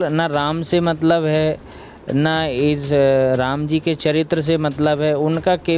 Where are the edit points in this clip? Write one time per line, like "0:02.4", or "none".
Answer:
none